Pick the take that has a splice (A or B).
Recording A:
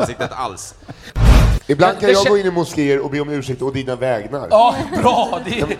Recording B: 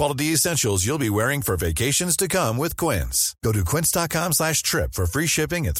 A